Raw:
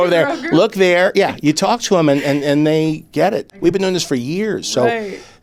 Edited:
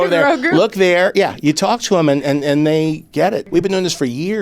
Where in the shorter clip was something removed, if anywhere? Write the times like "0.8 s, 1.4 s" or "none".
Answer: 3.5 s